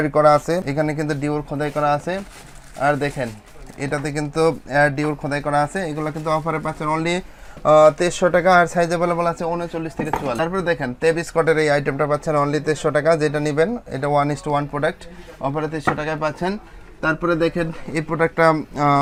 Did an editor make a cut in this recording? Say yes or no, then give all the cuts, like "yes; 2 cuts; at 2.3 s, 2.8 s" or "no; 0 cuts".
no; 0 cuts